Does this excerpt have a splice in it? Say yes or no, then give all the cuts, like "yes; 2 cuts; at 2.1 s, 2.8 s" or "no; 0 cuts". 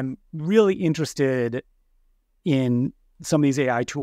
no; 0 cuts